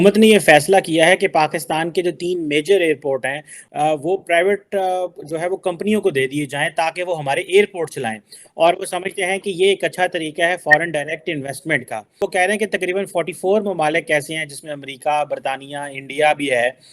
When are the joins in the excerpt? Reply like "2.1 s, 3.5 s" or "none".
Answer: none